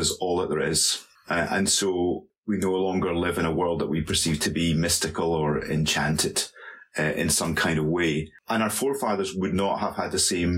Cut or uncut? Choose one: uncut